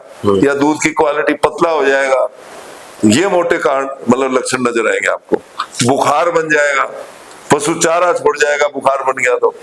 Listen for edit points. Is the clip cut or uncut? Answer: uncut